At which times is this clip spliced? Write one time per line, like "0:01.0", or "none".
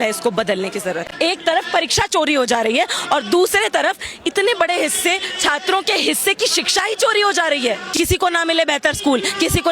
0:01.1
0:07.9